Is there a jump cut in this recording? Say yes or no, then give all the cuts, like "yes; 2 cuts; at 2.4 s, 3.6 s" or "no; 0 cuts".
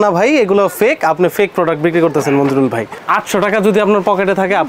yes; 1 cut; at 2.9 s